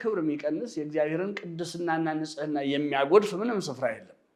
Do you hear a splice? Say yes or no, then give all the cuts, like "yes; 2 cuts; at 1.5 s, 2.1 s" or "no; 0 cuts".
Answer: no; 0 cuts